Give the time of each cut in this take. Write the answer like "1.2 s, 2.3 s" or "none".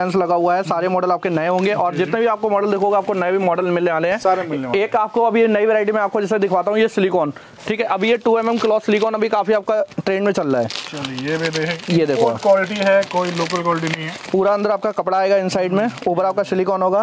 none